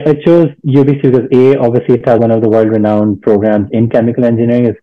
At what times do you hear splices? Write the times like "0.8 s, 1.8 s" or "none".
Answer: 2.2 s